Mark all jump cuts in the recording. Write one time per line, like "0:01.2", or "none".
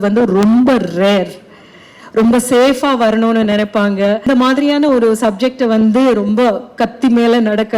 0:04.3